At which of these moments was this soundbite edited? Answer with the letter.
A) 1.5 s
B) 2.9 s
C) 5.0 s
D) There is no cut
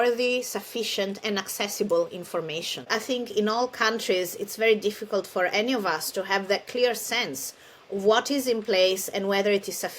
B